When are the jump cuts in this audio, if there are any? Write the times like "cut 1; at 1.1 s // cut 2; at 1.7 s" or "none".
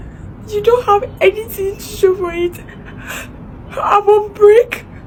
none